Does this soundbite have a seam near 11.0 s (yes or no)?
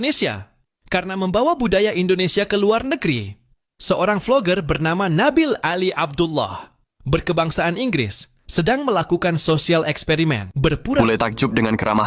yes